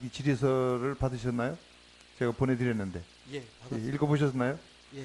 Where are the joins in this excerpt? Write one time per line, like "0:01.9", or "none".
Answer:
none